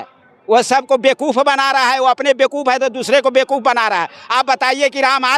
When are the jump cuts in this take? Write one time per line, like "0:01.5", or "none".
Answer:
none